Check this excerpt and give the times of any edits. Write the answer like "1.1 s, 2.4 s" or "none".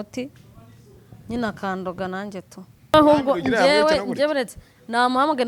2.9 s